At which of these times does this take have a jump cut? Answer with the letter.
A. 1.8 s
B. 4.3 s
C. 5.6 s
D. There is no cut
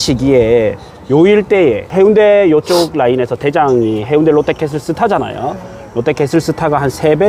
A